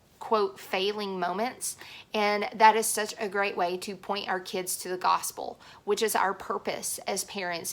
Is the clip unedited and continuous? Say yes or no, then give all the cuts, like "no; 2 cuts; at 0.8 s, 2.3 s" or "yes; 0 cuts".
yes; 0 cuts